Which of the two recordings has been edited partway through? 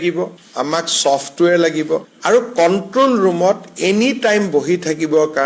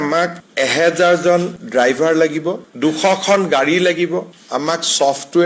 second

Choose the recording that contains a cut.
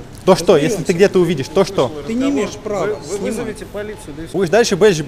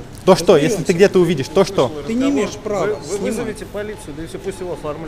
first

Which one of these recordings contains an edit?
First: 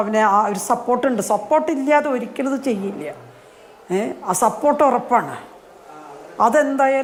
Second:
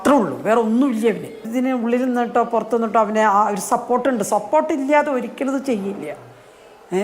second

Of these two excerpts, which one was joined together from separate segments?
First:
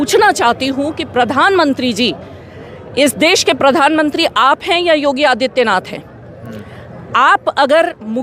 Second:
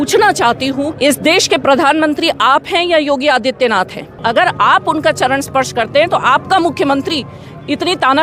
second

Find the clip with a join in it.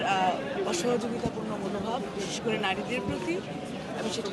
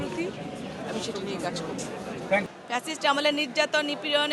second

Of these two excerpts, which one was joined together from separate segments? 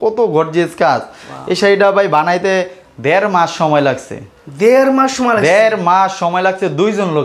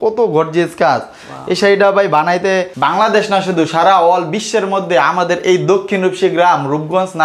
second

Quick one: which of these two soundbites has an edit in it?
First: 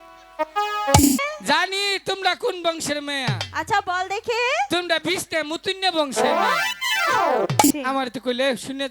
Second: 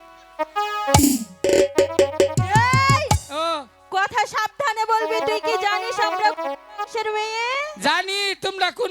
first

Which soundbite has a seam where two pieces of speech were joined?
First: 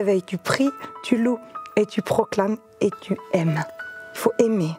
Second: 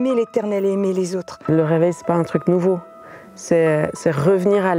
second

